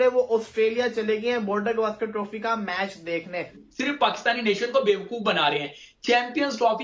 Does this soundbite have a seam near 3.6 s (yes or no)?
yes